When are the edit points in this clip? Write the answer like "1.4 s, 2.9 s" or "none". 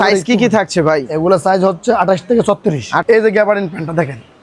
3.0 s